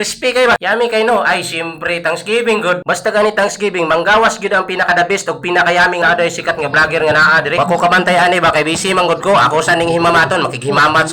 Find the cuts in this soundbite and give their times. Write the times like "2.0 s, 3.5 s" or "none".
6.0 s